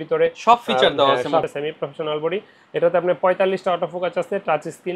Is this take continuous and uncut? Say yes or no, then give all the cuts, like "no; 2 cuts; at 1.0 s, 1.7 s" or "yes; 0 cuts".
no; 1 cut; at 1.4 s